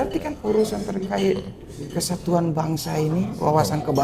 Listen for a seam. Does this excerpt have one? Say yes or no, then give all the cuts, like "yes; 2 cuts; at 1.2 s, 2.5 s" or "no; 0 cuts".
no; 0 cuts